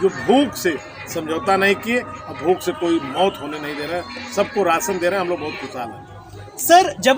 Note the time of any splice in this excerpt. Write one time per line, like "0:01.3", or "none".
none